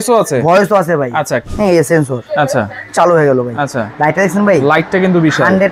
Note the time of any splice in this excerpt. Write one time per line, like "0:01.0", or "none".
0:01.5